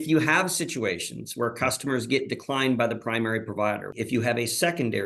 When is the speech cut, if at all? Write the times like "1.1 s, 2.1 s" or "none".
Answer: 4.0 s